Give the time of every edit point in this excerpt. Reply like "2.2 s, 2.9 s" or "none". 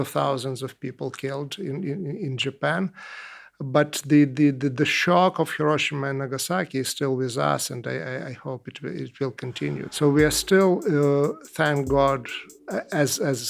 9.9 s